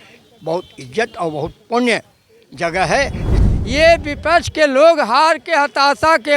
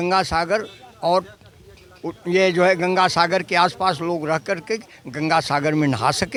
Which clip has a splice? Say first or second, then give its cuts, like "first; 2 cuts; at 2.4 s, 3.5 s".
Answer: first; 1 cut; at 3.5 s